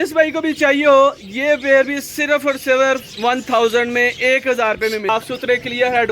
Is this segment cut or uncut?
cut